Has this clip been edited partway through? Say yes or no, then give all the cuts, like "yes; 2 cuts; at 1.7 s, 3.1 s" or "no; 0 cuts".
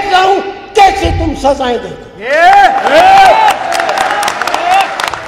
no; 0 cuts